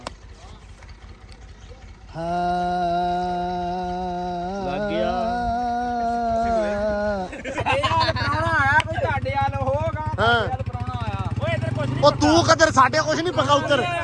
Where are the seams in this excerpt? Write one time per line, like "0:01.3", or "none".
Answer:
0:07.6